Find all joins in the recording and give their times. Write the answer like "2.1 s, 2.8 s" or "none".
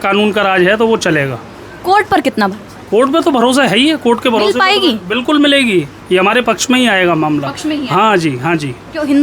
none